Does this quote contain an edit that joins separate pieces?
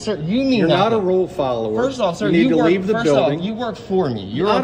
no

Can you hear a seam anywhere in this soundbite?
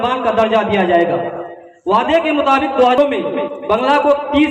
yes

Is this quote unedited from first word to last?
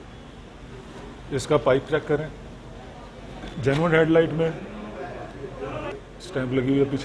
no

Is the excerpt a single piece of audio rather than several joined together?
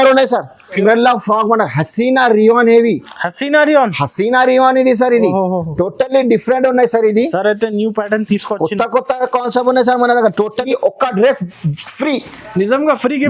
no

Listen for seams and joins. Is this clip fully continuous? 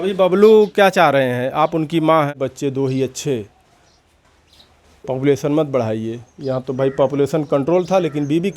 no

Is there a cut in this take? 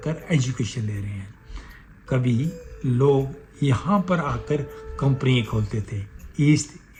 no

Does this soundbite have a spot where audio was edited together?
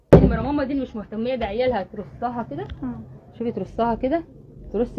no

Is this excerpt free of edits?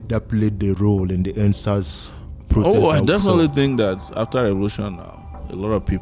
yes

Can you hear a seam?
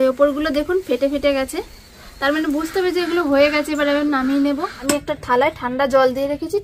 yes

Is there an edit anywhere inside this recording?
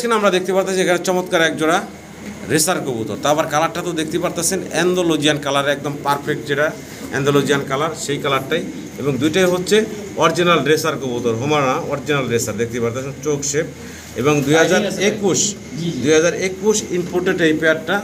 no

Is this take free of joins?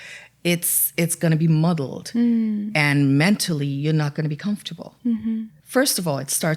no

